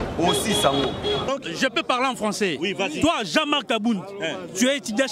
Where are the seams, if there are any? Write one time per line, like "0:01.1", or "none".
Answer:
0:01.3